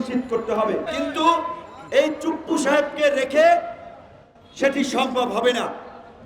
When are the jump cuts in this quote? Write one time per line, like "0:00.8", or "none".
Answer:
0:00.9